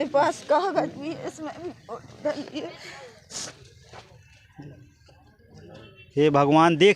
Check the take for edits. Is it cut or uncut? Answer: cut